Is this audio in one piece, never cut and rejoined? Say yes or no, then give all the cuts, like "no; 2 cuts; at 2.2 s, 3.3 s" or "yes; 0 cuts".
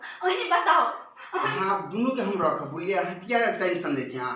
yes; 0 cuts